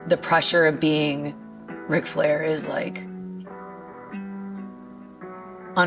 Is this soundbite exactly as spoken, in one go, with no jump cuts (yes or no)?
yes